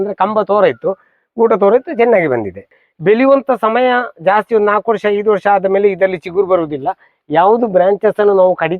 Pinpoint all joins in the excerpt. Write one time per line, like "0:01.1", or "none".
0:02.8